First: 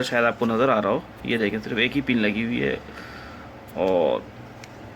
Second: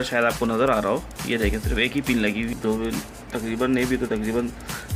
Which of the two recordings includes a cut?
second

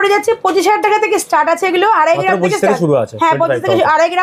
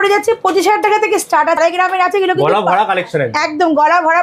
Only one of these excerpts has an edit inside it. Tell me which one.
second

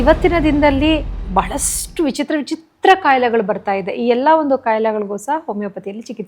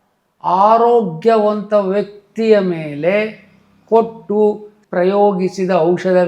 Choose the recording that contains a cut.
second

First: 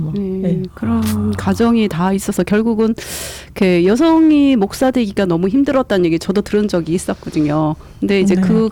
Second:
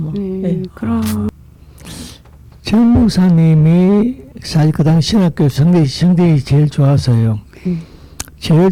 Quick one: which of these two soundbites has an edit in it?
second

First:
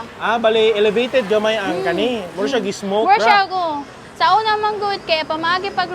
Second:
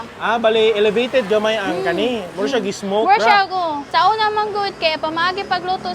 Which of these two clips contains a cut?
second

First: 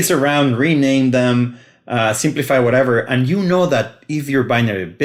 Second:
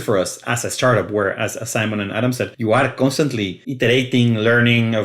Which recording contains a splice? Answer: second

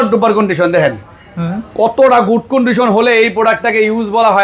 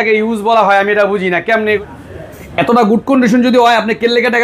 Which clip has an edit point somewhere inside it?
second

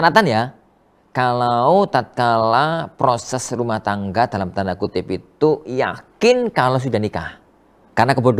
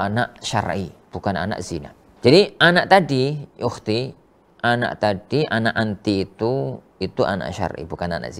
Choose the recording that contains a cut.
second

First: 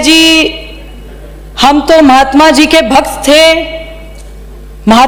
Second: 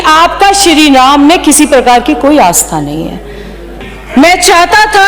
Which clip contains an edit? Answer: second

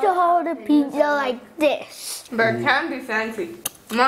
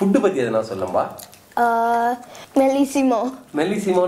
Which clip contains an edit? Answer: first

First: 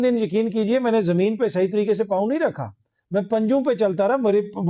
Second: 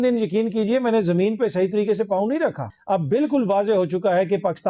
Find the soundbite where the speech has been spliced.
second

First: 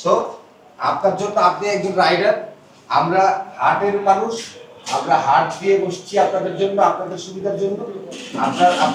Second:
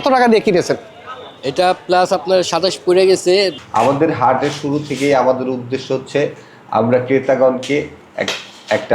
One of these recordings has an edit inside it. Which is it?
second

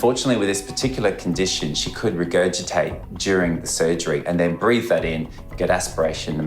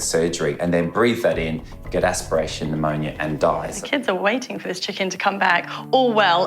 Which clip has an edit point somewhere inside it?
second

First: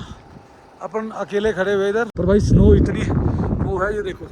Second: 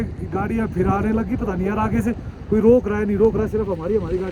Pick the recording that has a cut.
first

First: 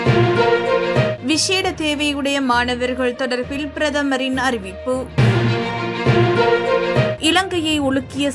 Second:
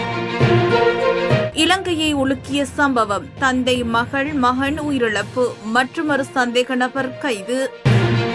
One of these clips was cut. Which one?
first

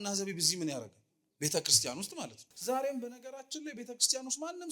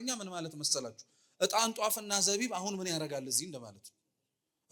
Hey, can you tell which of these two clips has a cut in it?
first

